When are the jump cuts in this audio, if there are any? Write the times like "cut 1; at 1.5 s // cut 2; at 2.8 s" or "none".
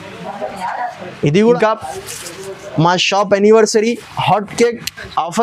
cut 1; at 1.6 s